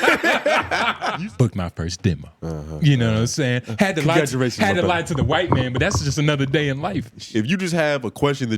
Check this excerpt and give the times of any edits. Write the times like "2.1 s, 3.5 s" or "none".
1.1 s, 7.2 s

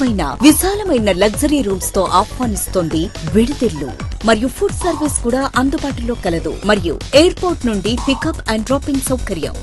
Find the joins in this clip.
none

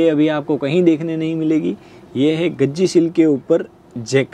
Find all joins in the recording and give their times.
none

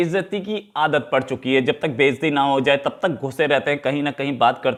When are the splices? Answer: none

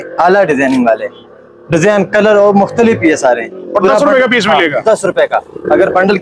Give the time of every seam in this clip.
none

